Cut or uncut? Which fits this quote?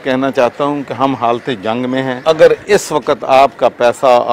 cut